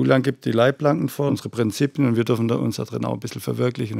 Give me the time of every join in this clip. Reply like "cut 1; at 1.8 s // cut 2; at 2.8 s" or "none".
cut 1; at 1.3 s

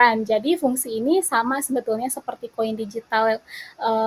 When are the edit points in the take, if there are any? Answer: none

